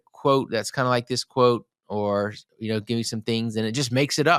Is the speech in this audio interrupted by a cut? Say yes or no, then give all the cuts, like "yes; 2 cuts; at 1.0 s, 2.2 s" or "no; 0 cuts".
no; 0 cuts